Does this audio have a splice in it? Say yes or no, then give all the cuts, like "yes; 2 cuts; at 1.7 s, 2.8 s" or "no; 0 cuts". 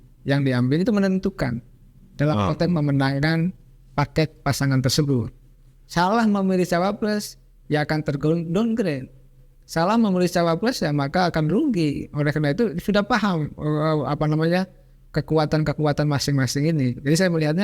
no; 0 cuts